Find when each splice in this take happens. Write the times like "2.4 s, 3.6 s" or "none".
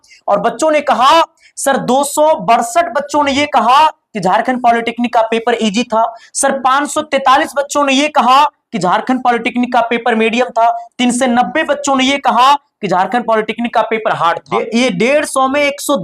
14.5 s